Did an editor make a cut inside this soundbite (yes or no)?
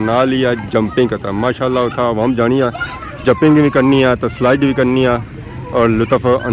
no